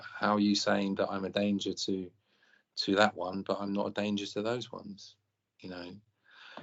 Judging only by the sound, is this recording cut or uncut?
uncut